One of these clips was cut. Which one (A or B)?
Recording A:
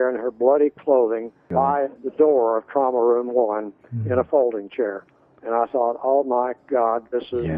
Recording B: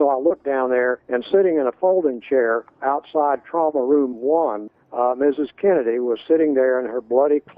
B